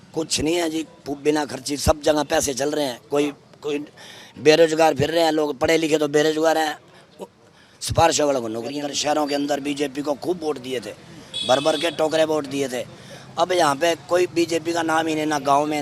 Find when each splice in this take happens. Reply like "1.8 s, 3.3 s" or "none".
8.9 s